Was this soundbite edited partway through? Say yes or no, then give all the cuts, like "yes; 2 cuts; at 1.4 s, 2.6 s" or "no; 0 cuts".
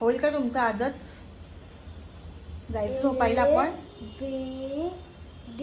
no; 0 cuts